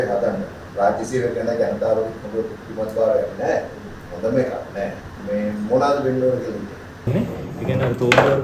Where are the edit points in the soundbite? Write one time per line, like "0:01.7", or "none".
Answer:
0:05.1
0:07.1